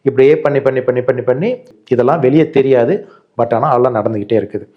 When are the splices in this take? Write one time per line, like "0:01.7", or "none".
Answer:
0:01.7